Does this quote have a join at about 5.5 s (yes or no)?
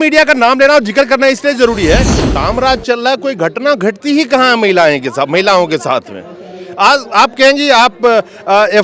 no